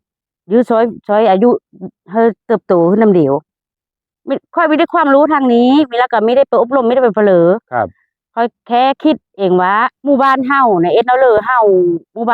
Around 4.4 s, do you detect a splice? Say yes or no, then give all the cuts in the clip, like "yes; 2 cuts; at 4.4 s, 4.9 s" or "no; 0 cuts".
no; 1 cut; at 9.9 s